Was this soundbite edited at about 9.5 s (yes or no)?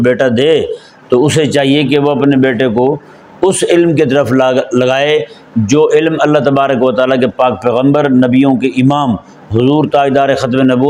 no